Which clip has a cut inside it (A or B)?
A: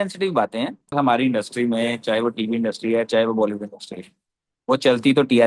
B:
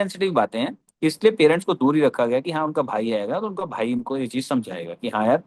A